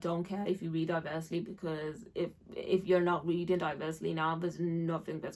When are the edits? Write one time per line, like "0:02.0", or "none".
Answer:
none